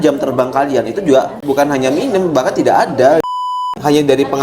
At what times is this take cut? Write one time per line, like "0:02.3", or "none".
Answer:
0:01.4
0:03.4